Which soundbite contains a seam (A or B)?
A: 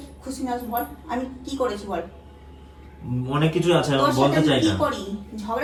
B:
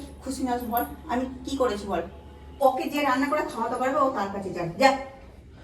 B